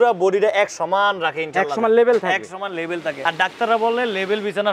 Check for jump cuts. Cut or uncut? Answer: cut